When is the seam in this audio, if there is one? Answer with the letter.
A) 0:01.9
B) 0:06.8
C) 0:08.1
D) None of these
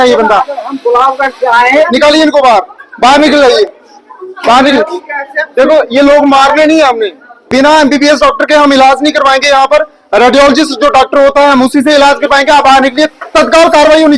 A